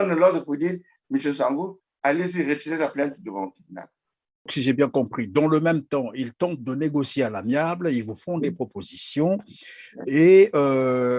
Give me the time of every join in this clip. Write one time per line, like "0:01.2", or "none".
0:04.5